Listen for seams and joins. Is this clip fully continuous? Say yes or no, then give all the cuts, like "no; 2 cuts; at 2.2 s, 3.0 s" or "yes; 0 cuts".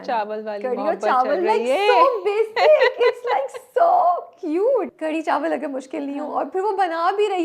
no; 1 cut; at 4.9 s